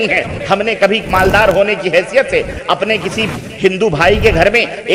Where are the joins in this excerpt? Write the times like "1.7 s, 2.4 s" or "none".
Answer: none